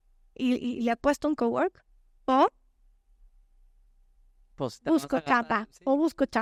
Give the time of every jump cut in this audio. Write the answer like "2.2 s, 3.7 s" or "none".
none